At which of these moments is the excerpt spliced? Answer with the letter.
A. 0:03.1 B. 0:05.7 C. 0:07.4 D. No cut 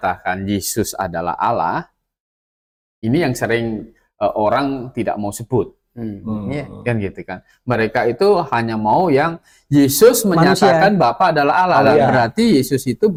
D